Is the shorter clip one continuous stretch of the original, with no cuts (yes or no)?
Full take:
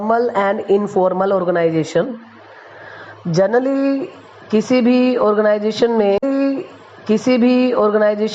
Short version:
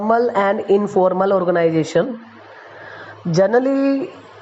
yes